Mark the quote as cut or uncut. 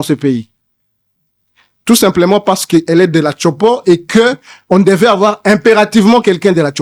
uncut